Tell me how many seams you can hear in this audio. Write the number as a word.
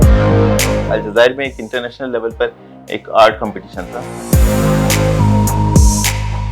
two